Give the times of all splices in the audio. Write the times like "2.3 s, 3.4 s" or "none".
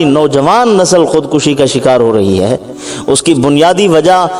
none